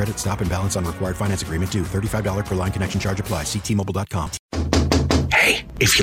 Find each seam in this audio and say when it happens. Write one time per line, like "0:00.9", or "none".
0:04.5